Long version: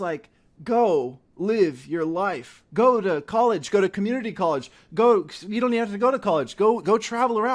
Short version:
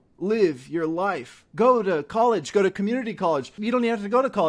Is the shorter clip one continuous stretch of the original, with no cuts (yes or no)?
no